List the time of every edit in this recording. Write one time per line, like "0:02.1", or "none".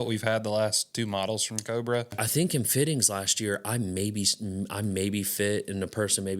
0:02.2